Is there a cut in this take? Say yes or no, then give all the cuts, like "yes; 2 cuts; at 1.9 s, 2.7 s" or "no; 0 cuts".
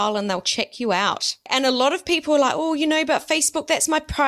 yes; 1 cut; at 1.5 s